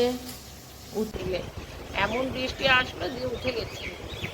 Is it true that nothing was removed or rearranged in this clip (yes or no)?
no